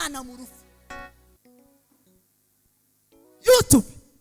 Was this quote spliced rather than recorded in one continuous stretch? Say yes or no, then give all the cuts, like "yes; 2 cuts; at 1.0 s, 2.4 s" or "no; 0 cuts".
yes; 1 cut; at 1.3 s